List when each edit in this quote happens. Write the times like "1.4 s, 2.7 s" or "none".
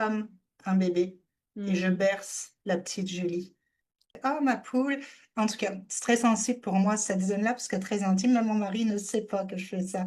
4.1 s